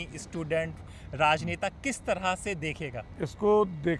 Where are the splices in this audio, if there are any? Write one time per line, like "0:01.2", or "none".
0:03.1

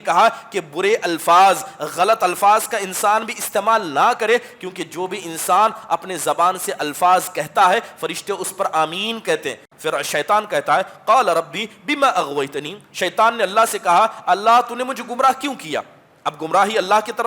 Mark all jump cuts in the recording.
0:09.7

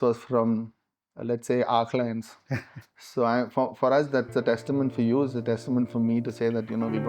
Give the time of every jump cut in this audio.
none

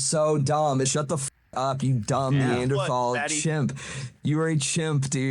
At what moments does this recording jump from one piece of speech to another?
0:00.9

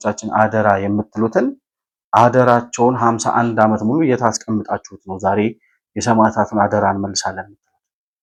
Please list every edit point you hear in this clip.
none

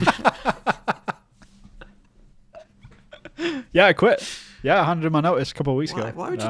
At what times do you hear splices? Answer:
none

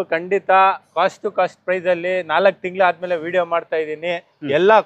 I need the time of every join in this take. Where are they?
none

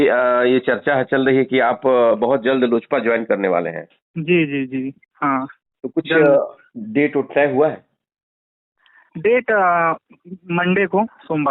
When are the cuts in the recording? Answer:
none

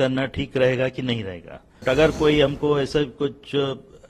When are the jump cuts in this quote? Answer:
0:01.8

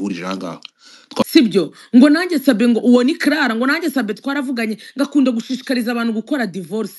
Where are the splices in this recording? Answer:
0:01.1

